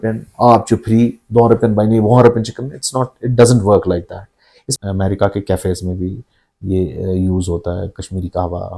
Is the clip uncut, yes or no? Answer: no